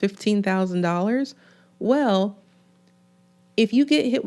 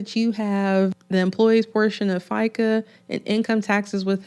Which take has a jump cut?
second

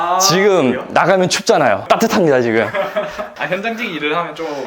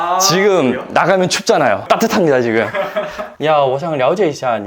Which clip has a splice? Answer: second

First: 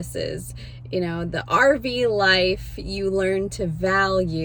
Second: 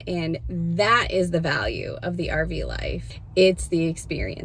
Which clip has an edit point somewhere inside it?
second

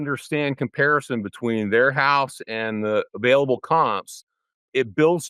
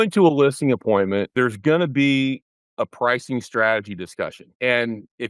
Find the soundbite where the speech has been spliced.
second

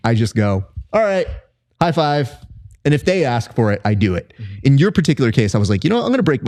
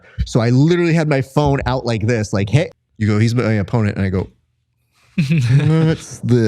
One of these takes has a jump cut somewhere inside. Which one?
second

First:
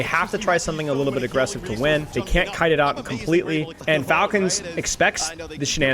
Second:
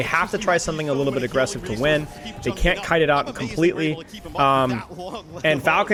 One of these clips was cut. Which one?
first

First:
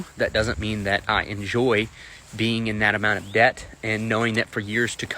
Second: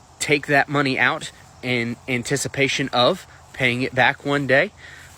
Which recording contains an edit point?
first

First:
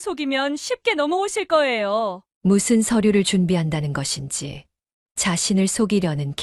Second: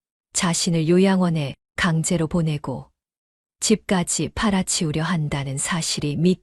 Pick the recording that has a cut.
first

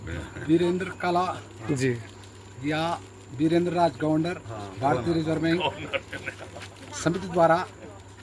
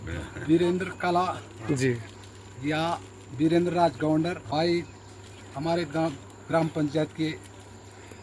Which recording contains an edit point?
second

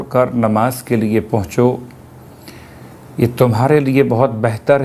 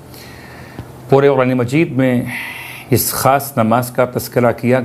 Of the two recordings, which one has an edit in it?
second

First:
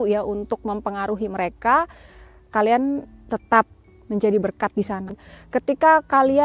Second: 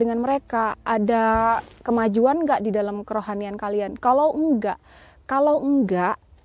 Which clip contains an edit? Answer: first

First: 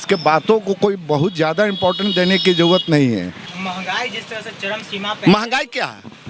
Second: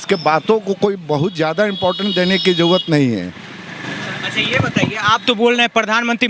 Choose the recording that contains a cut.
first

